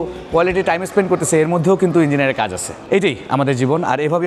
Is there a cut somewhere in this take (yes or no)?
no